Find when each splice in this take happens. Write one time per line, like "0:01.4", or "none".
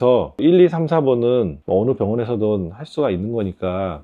0:01.6